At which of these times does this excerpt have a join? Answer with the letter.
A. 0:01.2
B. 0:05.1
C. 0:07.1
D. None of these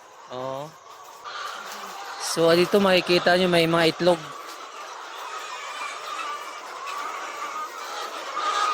A